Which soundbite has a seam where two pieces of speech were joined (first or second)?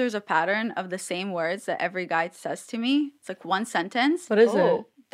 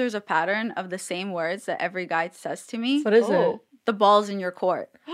second